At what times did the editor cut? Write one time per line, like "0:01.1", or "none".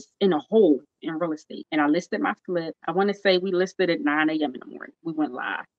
0:01.5
0:02.8